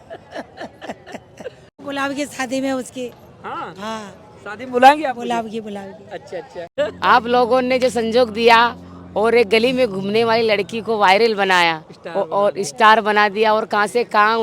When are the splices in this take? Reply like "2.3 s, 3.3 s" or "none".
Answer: 1.8 s, 6.6 s